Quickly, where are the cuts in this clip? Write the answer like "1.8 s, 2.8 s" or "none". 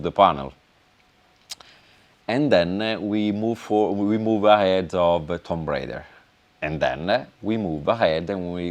none